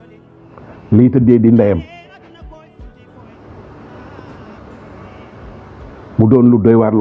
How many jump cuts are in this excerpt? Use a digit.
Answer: 2